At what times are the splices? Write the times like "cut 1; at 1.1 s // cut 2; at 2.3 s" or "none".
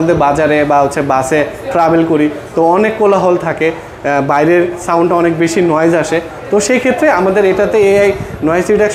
none